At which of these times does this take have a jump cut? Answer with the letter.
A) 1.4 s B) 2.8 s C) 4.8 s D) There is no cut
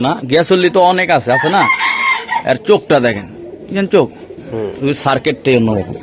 D